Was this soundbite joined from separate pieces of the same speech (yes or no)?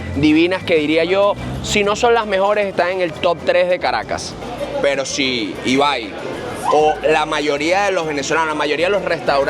yes